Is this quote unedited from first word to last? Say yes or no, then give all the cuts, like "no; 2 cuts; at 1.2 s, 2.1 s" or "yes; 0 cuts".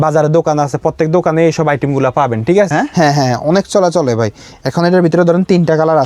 no; 1 cut; at 2.7 s